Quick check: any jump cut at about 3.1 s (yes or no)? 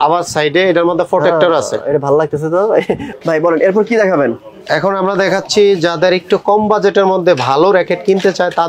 no